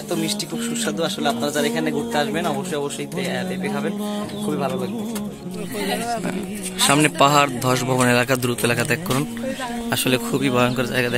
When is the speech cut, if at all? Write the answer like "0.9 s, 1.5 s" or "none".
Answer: none